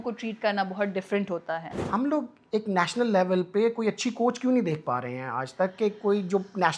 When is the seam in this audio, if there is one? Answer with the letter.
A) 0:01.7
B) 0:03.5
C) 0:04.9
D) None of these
A